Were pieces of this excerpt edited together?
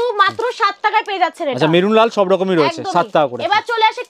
no; 0 cuts

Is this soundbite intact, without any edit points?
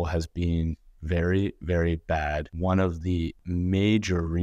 no; 2 cuts; at 2.5 s, 3.4 s

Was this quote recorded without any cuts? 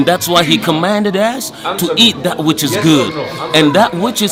yes; 0 cuts

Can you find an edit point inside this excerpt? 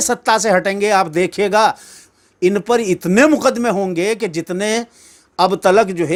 no; 0 cuts

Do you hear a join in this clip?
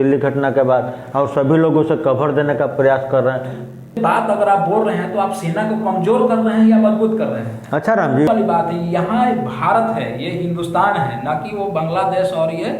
yes; 2 cuts; at 4.0 s, 8.2 s

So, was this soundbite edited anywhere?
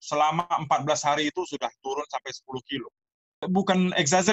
yes; 1 cut; at 3.4 s

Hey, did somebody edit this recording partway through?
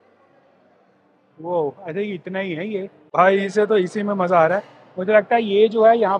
yes; 1 cut; at 3.0 s

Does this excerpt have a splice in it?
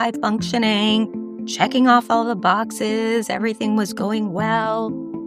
no; 0 cuts

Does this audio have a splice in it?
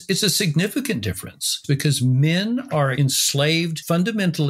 yes; 1 cut; at 2.9 s

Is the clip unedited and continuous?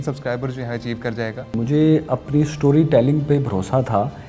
no; 1 cut; at 1.5 s

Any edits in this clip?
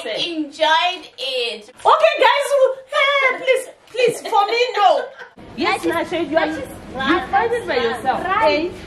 yes; 2 cuts; at 1.6 s, 5.4 s

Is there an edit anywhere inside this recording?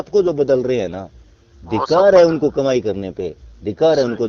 no; 0 cuts

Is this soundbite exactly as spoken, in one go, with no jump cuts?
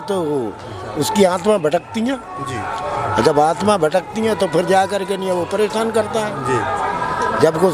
yes; 0 cuts

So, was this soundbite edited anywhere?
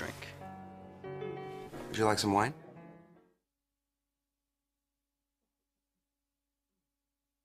no; 0 cuts

